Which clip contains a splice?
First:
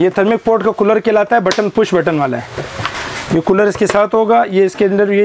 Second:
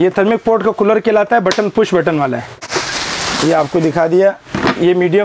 second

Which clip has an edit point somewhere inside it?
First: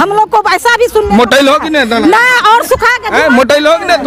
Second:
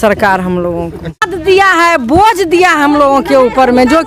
second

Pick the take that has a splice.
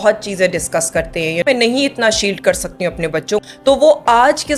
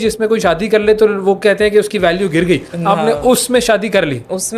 first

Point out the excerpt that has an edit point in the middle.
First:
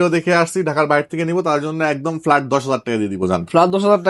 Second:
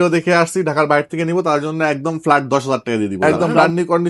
second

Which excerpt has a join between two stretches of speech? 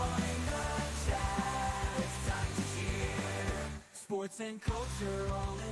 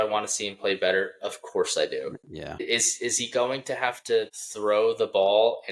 second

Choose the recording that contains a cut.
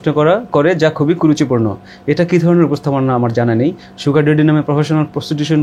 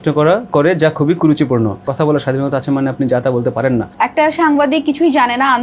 second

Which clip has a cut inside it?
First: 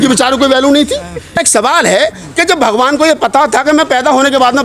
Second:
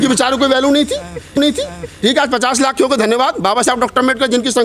first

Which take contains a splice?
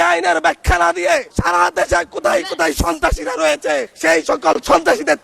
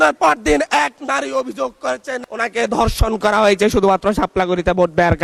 first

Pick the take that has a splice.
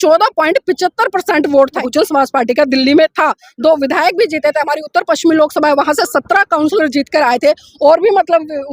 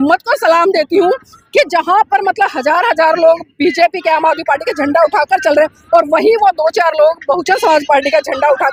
first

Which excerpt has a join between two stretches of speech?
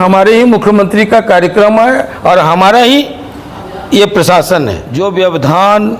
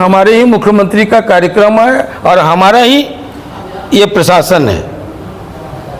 first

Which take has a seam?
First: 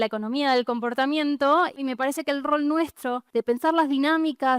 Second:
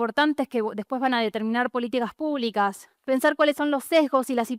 first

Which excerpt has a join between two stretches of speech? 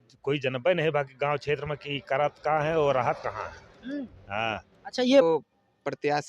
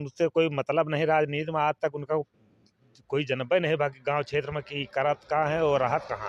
first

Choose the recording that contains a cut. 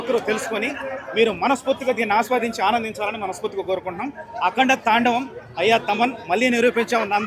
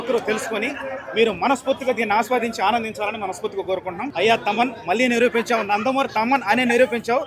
second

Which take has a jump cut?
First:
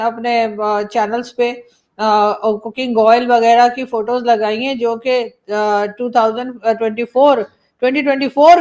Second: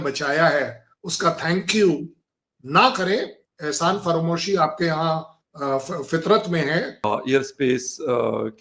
second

